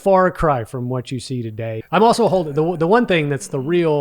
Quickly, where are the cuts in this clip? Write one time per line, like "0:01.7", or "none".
0:01.8